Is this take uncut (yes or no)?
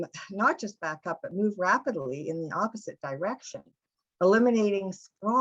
yes